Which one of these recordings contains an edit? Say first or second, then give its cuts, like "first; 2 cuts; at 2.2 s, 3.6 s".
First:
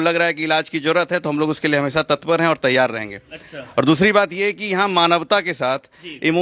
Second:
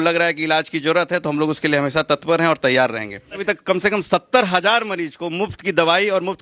second; 1 cut; at 3.4 s